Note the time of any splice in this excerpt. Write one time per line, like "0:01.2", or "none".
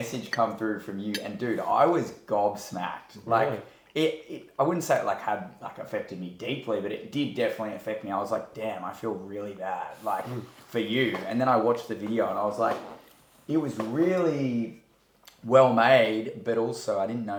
none

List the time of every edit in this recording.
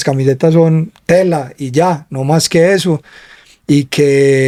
none

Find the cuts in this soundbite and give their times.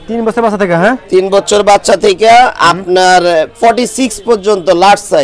none

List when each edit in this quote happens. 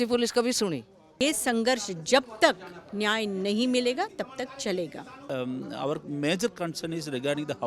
0:01.2
0:05.3

